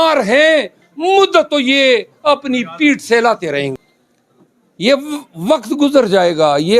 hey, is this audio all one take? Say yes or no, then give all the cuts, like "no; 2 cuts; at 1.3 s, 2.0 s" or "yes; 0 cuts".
no; 1 cut; at 3.7 s